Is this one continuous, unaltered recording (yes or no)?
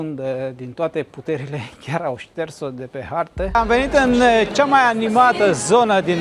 no